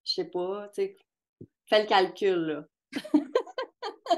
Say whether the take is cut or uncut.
uncut